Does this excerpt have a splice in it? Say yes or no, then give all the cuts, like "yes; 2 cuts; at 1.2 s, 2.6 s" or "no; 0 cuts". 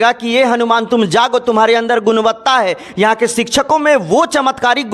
no; 0 cuts